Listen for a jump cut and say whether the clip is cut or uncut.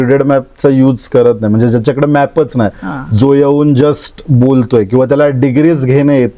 uncut